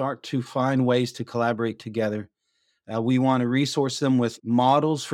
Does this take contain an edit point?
no; 0 cuts

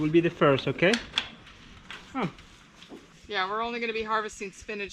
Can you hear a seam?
yes; 1 cut; at 3.0 s

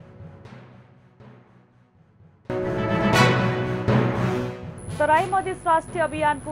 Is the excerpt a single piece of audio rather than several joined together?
no; 1 cut; at 1.3 s

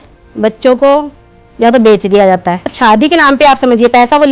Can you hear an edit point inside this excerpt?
yes; 1 cut; at 2.7 s

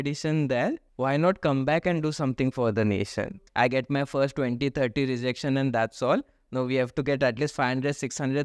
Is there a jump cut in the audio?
yes; 2 cuts; at 0.9 s, 3.3 s

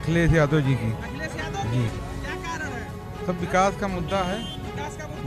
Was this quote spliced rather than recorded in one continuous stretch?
no; 0 cuts

